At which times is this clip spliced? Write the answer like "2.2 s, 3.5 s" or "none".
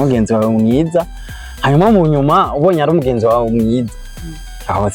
none